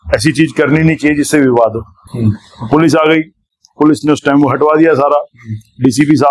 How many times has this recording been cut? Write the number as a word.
one